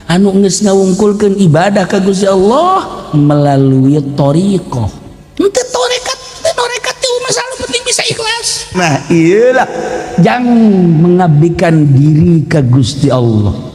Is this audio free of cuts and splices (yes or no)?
no